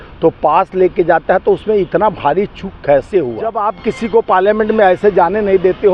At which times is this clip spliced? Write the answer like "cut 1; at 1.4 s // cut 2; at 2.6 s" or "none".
cut 1; at 3.7 s